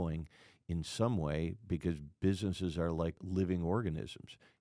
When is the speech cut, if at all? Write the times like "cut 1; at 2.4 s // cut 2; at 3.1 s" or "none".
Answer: cut 1; at 3.2 s